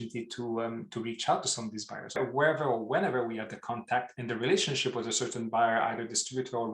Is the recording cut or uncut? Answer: cut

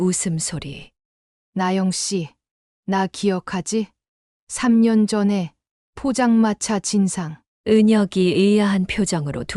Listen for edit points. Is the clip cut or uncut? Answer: cut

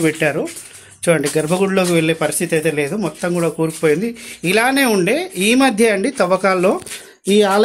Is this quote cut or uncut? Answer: uncut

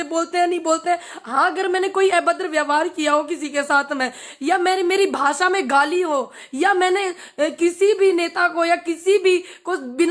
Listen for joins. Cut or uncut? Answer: uncut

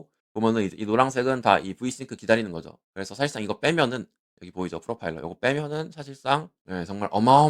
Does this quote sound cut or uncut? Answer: cut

